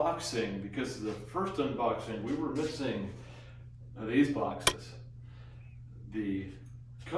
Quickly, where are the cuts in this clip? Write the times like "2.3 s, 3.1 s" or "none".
5.7 s